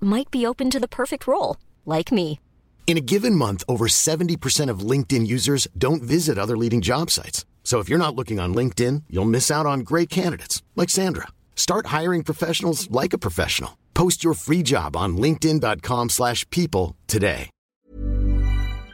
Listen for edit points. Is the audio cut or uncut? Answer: cut